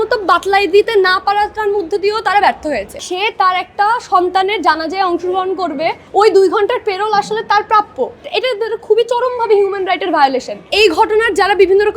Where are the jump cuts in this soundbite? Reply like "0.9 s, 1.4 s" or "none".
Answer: 3.1 s, 6.0 s, 8.3 s, 10.6 s